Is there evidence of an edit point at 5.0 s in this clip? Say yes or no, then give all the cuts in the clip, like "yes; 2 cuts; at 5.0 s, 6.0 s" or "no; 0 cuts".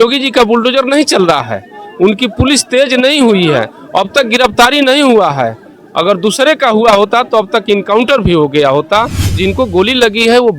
no; 1 cut; at 9.4 s